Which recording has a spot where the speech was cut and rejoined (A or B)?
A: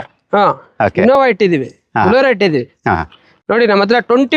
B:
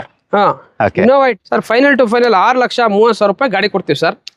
B